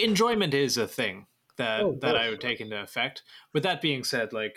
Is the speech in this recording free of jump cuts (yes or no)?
yes